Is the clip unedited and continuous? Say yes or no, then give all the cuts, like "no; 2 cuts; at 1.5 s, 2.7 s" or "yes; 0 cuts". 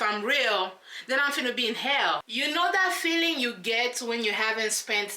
no; 1 cut; at 2.3 s